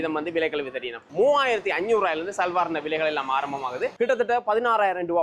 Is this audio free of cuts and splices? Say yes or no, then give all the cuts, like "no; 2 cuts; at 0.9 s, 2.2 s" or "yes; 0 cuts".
no; 2 cuts; at 1.0 s, 3.9 s